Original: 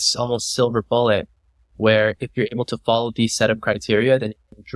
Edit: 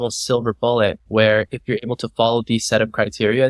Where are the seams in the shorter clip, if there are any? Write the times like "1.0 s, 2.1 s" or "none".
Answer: 1.0 s